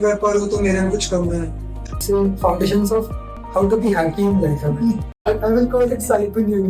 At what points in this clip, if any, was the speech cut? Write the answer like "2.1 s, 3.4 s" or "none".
2.0 s, 5.3 s